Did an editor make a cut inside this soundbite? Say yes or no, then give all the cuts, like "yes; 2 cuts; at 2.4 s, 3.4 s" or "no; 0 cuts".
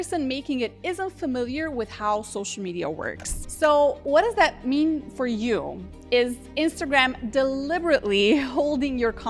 yes; 2 cuts; at 3.4 s, 4.0 s